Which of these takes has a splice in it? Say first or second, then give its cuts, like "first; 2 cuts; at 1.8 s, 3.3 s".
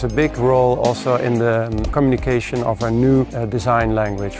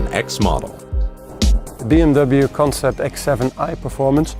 second; 1 cut; at 1.5 s